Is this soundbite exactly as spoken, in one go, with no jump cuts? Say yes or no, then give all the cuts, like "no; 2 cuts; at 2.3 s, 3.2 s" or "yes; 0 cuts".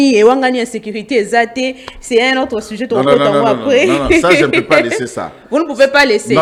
yes; 0 cuts